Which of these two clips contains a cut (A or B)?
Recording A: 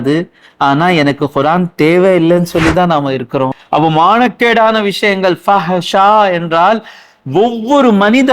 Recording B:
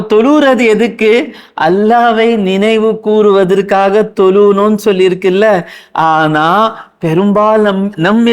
A